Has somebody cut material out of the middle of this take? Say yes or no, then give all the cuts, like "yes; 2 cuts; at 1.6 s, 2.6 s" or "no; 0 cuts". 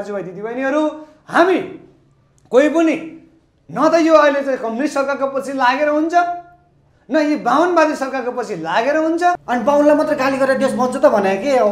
yes; 1 cut; at 9.4 s